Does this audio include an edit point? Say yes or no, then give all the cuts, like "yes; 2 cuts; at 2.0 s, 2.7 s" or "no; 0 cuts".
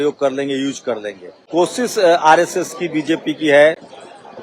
no; 0 cuts